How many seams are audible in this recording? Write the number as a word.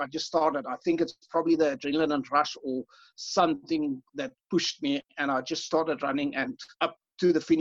two